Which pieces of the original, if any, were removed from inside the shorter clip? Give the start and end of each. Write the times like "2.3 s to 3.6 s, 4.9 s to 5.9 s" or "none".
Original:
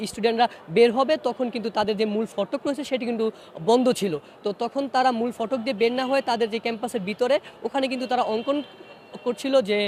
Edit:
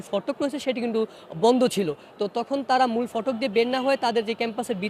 none